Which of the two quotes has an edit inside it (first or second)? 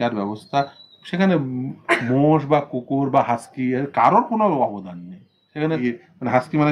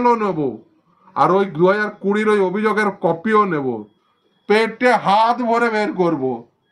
first